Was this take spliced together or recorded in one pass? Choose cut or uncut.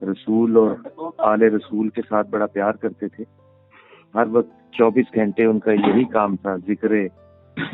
uncut